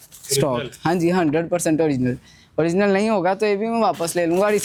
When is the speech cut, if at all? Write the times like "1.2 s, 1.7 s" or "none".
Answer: none

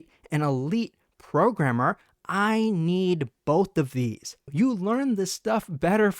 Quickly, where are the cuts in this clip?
4.5 s

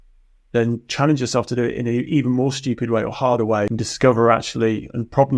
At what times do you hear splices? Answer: 3.7 s

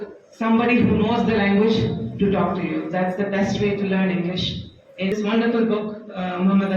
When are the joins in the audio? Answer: 5.1 s

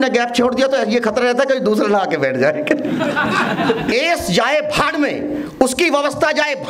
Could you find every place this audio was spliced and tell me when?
3.9 s

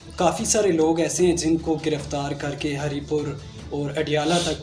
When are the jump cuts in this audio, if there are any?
none

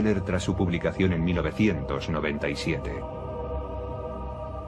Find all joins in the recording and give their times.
none

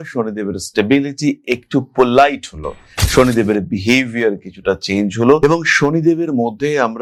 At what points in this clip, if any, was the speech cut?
none

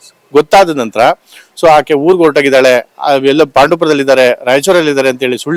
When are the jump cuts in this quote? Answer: none

